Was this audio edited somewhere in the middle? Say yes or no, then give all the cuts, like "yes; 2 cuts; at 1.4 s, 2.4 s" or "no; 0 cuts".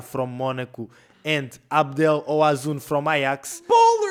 no; 0 cuts